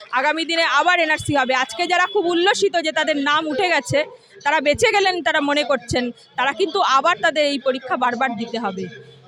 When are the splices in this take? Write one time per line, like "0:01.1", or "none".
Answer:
none